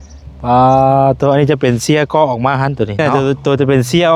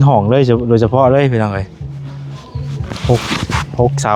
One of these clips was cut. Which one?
first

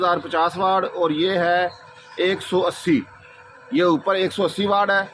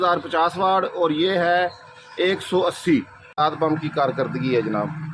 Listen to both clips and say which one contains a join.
second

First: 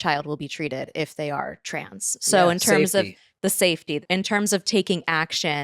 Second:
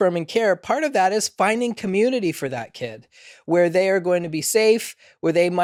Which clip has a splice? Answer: first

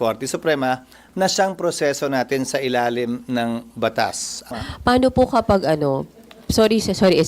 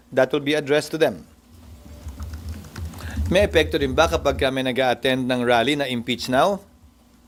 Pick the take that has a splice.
first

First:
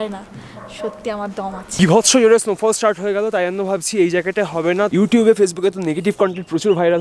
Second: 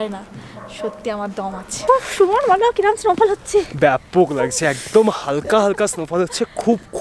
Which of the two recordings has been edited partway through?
first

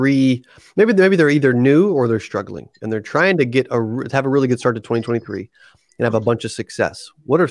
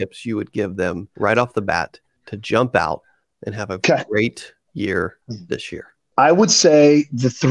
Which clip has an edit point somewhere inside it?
second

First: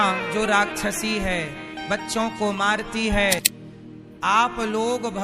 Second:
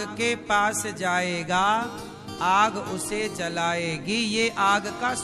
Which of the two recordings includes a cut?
first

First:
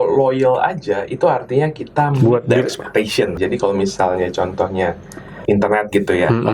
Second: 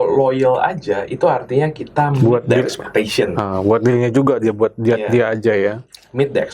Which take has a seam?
first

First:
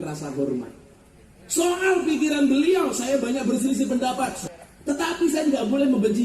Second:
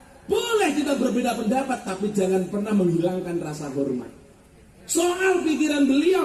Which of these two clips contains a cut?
first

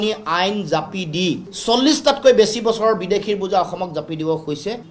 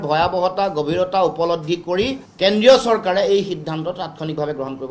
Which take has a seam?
first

